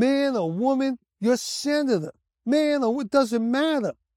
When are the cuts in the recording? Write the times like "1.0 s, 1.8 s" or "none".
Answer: none